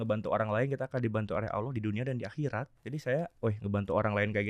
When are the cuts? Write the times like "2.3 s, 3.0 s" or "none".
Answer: 2.7 s

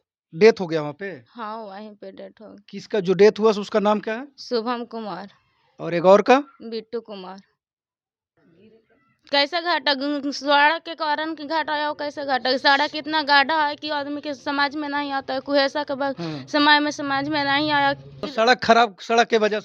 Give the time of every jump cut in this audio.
8.4 s, 18.3 s

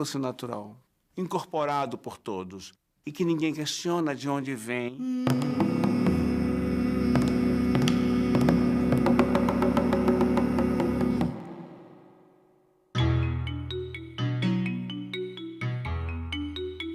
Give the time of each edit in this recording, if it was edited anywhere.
none

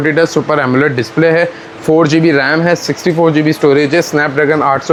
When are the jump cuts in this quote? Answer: none

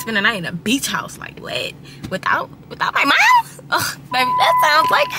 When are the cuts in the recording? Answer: none

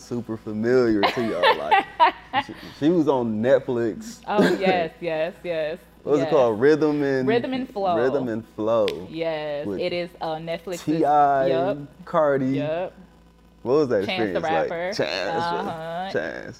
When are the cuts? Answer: none

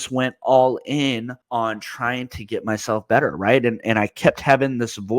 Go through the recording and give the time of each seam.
1.4 s

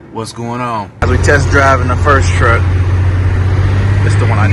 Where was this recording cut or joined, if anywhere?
1.0 s

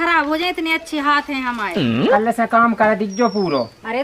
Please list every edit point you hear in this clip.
1.8 s

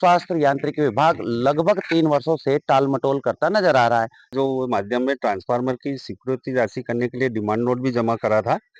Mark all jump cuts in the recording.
4.3 s

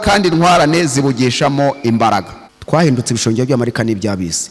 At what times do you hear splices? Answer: 2.3 s

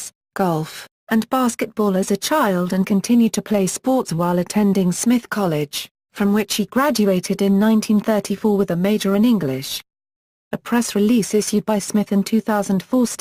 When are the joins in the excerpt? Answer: none

